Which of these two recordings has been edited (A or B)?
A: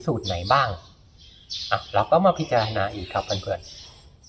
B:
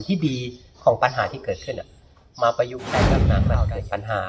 B